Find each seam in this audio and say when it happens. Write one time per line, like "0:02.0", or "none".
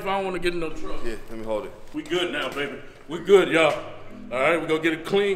0:01.8